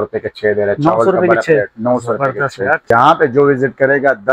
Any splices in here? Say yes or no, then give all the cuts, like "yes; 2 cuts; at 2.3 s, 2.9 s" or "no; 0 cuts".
yes; 1 cut; at 2.9 s